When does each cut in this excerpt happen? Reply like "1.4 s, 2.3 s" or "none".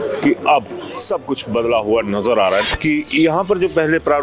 2.7 s